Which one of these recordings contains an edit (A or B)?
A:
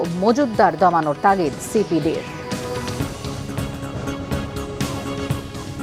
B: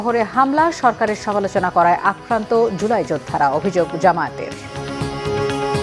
A